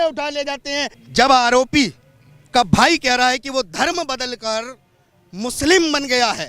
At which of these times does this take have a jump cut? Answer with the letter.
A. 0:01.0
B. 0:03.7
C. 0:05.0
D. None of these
A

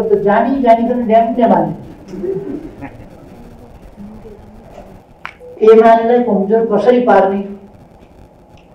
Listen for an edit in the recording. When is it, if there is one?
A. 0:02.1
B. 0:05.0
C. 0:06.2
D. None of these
B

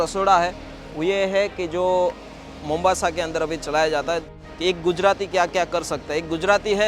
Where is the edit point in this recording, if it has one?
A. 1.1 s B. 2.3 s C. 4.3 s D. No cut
C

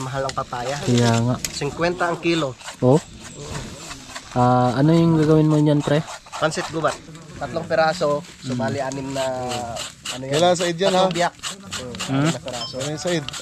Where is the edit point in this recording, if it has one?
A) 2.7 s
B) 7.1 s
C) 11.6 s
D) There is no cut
B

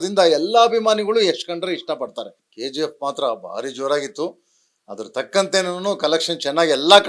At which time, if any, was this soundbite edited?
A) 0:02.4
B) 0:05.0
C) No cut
A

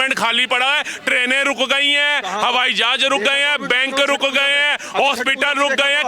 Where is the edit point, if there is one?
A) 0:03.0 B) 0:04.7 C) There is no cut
C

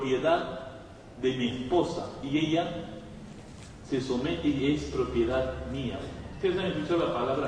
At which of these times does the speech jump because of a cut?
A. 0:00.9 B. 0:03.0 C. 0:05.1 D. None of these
C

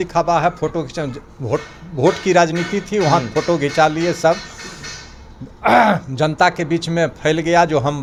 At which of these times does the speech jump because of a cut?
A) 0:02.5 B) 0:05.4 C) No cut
C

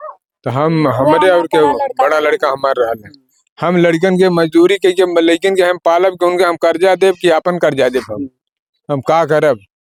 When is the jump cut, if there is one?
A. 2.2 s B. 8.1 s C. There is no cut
C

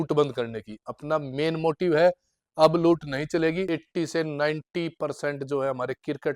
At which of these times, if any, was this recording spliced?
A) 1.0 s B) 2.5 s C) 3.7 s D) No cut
C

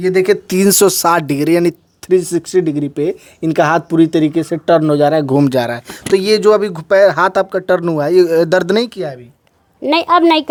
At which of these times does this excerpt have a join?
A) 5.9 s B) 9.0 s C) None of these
C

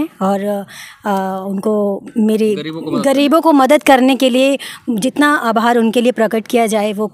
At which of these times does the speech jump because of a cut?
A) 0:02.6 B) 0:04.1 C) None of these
C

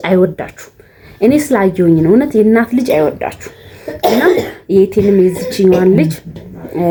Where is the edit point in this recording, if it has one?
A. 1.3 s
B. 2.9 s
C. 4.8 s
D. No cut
D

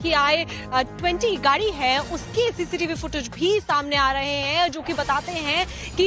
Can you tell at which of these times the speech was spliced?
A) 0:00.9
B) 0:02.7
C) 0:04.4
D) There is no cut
A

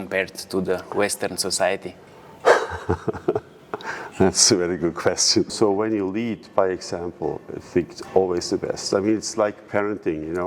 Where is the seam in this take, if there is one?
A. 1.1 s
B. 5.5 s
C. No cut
B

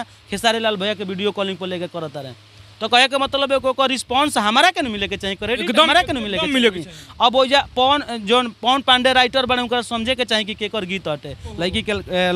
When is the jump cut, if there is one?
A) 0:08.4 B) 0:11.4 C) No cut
B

